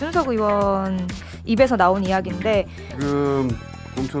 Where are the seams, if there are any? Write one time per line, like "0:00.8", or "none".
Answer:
0:02.8